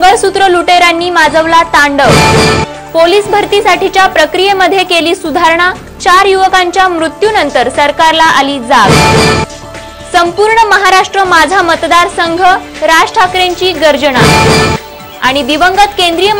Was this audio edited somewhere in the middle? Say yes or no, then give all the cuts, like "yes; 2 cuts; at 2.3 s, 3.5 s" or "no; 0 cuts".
no; 0 cuts